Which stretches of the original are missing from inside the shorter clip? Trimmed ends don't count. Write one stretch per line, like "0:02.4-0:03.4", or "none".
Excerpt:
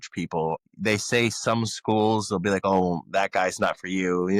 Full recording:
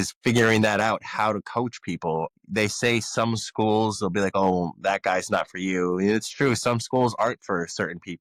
none